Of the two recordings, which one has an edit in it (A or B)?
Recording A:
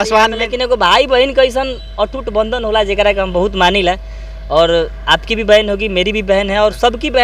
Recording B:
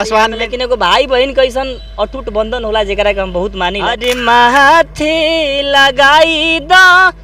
B